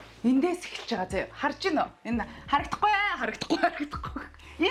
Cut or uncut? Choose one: uncut